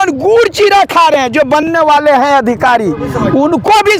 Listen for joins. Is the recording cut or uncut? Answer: uncut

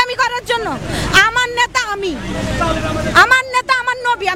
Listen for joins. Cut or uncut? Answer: cut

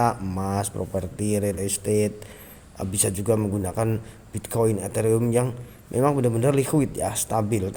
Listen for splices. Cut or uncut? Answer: uncut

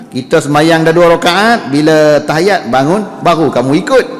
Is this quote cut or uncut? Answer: uncut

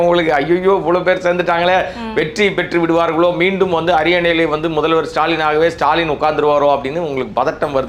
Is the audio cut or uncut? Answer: uncut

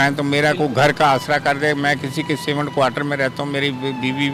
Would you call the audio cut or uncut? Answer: uncut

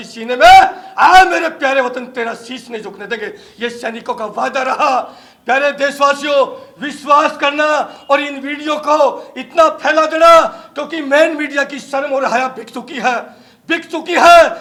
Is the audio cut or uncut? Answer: uncut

